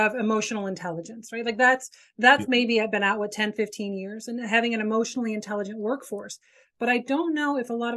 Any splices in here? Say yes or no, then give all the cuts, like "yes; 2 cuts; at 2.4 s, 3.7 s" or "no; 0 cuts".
no; 0 cuts